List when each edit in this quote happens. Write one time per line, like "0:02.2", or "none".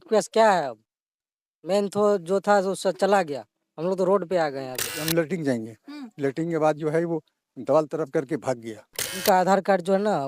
0:05.0
0:09.1